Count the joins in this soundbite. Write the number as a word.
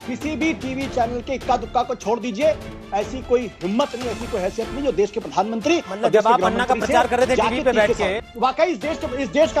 one